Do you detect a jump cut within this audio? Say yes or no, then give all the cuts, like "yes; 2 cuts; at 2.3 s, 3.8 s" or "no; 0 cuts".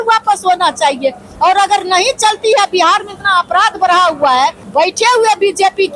yes; 1 cut; at 4.6 s